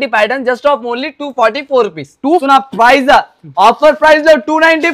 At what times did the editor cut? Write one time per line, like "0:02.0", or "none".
0:02.4